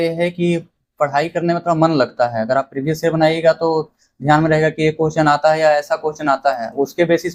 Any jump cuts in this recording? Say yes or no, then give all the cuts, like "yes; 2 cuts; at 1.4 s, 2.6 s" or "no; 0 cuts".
no; 0 cuts